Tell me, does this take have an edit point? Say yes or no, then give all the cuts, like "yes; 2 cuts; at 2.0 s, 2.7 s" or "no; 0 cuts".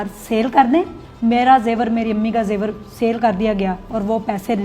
yes; 1 cut; at 1.0 s